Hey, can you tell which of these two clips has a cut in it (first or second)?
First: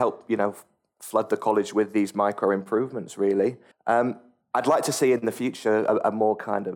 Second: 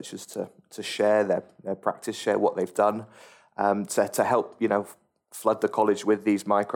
first